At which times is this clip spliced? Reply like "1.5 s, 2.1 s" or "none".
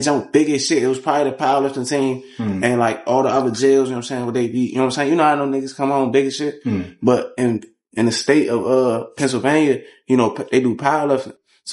none